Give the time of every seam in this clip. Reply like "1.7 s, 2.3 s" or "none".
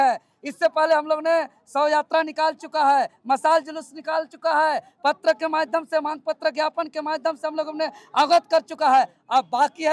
none